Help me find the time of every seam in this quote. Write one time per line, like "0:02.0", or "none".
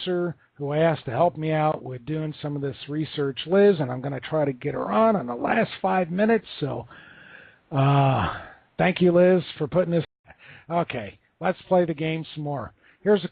none